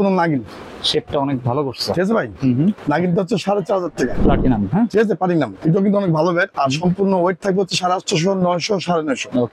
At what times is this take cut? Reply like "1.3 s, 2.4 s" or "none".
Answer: 2.8 s, 4.2 s